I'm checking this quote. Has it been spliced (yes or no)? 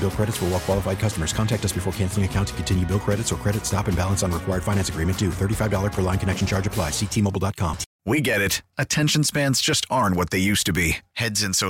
yes